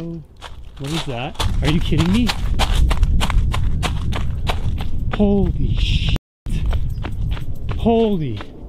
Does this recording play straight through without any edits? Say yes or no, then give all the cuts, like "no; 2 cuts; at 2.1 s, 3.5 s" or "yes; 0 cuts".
no; 1 cut; at 1.4 s